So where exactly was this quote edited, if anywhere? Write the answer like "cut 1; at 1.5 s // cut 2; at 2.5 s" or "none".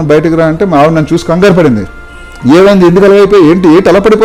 none